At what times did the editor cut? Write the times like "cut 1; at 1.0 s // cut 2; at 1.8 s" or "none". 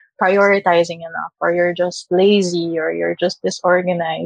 none